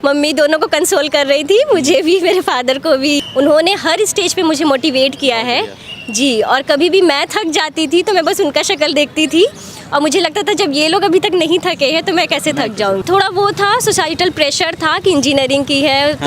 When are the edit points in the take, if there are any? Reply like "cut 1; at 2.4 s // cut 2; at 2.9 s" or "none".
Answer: cut 1; at 3.3 s // cut 2; at 13.0 s